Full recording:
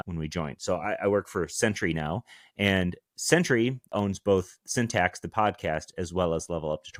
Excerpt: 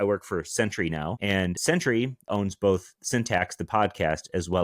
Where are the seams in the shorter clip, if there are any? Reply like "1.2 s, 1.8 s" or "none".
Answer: 1.4 s